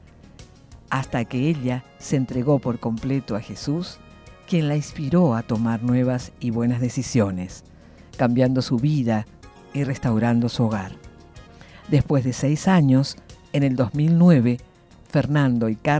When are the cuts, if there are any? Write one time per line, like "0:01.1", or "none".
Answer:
0:13.2